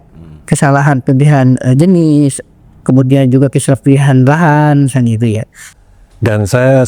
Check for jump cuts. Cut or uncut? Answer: cut